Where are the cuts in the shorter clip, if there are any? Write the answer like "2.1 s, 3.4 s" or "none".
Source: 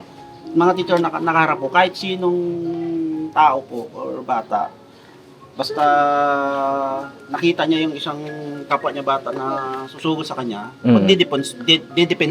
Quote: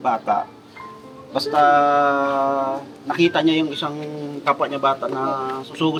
none